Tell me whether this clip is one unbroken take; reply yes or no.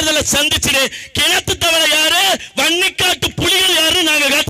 yes